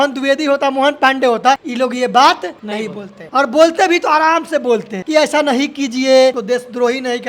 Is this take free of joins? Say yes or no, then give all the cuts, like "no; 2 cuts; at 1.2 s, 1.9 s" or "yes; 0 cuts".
no; 4 cuts; at 1.7 s, 2.8 s, 4.9 s, 6.4 s